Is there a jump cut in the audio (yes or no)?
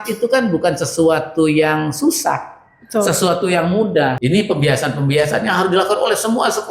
yes